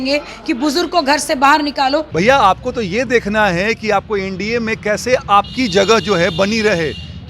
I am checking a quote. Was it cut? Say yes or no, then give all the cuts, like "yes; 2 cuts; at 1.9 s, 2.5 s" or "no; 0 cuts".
yes; 1 cut; at 2.1 s